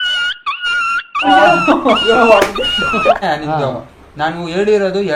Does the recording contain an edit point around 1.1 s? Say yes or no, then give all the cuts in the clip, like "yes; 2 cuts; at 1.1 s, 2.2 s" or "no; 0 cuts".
no; 1 cut; at 3.2 s